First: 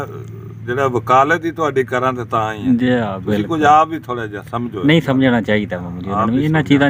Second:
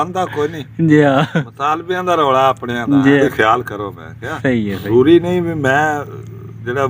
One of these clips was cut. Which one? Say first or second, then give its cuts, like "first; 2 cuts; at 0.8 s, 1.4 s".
second; 2 cuts; at 3.2 s, 4.9 s